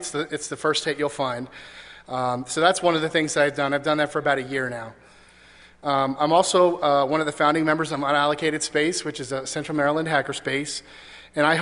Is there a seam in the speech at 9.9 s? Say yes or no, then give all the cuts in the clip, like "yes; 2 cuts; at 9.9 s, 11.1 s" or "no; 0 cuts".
no; 0 cuts